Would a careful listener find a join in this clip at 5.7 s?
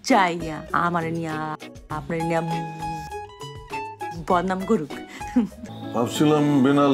yes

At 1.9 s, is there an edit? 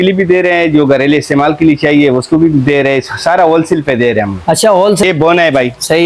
no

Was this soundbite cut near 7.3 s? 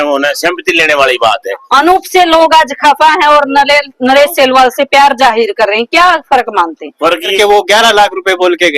yes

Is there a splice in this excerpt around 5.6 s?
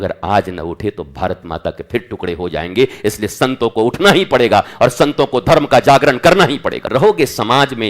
no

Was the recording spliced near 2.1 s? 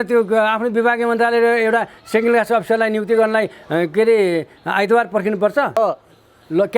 no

